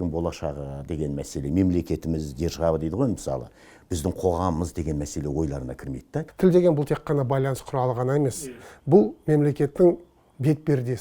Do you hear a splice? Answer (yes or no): yes